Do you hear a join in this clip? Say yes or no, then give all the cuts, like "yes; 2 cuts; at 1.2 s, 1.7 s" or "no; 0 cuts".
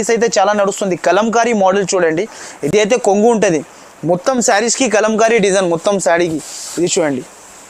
no; 0 cuts